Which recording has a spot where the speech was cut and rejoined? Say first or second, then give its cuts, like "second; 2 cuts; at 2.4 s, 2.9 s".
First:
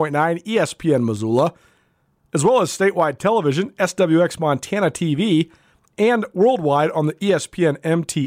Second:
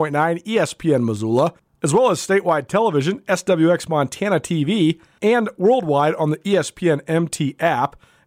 second; 2 cuts; at 1.7 s, 5.1 s